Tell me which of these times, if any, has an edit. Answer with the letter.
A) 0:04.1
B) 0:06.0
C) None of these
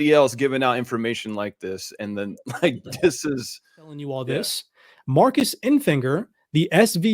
A